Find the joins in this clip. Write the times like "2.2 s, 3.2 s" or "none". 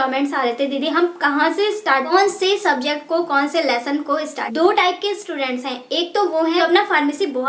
2.1 s, 4.5 s, 6.6 s